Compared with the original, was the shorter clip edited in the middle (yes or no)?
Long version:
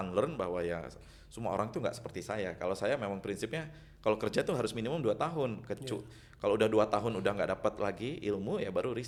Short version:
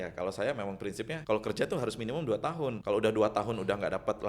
yes